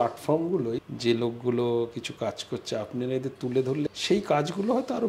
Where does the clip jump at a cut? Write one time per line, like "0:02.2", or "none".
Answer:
0:00.8
0:03.9